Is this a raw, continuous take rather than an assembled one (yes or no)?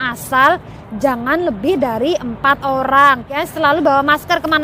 no